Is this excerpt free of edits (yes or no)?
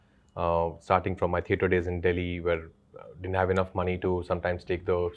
yes